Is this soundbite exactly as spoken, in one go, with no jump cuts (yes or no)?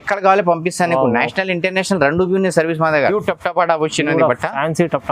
no